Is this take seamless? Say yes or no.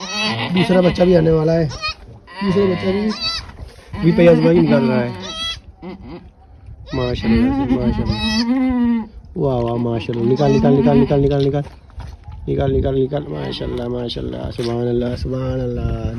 yes